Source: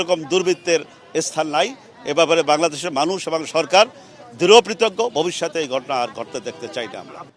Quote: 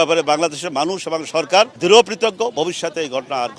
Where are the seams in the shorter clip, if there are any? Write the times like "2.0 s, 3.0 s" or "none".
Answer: 1.7 s